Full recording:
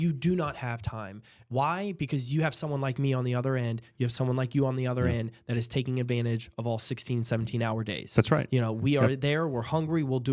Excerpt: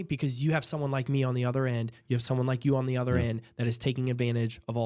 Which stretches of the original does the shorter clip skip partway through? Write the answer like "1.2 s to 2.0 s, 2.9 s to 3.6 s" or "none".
none